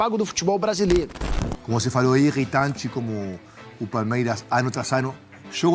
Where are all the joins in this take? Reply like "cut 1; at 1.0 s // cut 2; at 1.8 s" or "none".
cut 1; at 1.2 s